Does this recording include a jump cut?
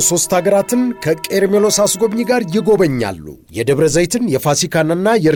no; 0 cuts

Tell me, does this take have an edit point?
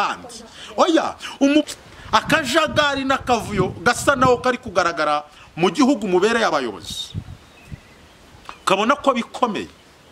yes; 1 cut; at 1.7 s

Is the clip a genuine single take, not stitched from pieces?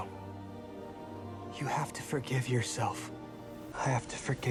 yes; 0 cuts

